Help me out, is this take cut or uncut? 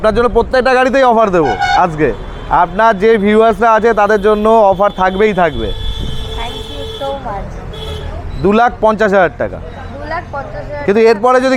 uncut